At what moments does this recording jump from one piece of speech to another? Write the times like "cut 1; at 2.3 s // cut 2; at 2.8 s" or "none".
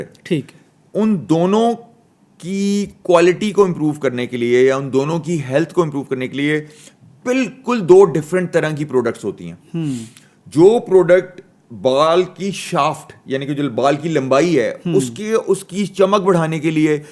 none